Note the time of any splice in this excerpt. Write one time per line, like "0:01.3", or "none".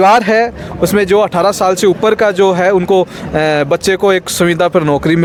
none